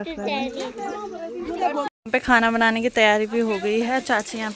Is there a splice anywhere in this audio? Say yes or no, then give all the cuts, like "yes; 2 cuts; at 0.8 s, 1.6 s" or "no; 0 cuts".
yes; 1 cut; at 1.9 s